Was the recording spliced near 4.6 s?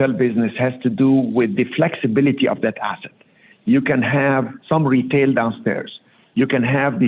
yes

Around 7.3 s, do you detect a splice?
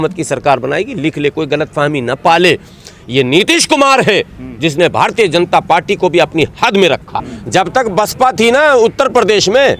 yes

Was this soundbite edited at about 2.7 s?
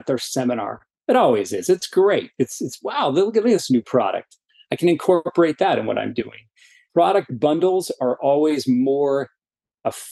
no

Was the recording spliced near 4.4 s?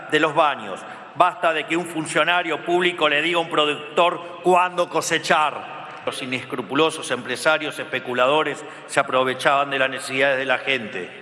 no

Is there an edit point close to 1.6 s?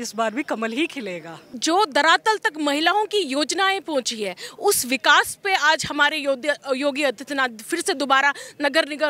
yes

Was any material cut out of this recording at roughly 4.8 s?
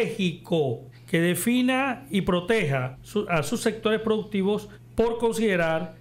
yes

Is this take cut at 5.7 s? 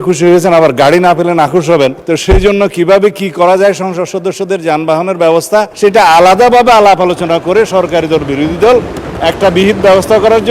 yes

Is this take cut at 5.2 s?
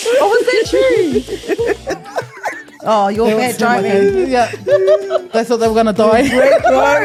no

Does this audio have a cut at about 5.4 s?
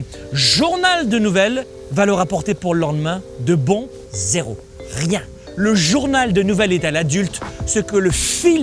yes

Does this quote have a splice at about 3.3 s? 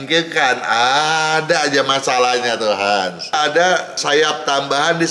yes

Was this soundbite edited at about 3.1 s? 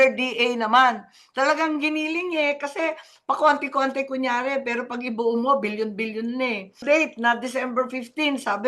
no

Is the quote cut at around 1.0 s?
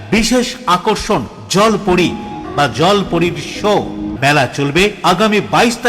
no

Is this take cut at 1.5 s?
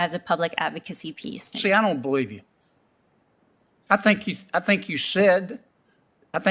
yes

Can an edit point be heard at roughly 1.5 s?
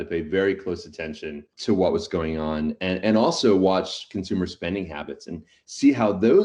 yes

